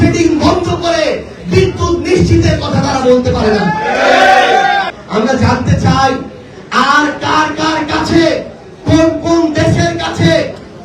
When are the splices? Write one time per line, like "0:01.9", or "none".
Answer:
0:05.0

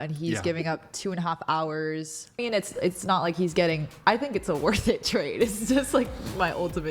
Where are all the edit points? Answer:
0:02.3

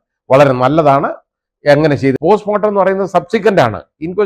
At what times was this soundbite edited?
0:02.1

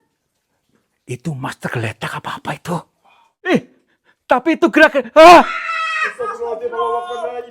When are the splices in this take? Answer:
0:03.5

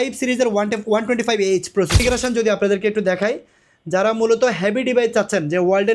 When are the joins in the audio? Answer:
0:02.0

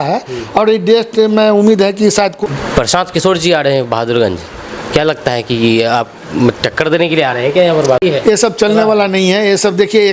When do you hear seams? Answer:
0:02.3
0:08.0

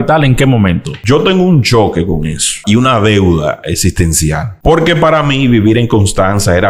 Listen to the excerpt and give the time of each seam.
0:01.0
0:02.6
0:04.5

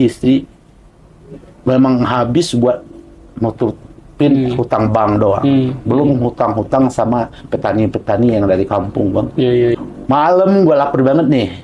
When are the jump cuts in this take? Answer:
0:09.7

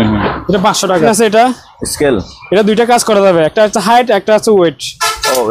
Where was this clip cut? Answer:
0:00.9

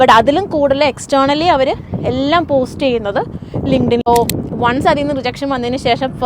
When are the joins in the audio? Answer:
0:04.1

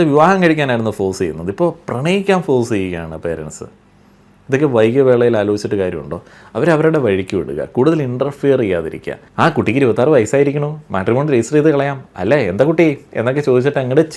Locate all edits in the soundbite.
0:09.2

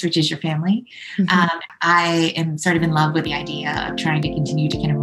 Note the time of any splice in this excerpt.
0:01.6

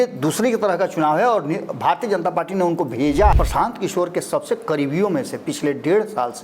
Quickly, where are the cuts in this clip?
0:03.3

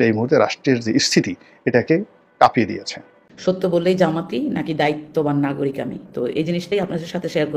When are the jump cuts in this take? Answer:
0:03.3

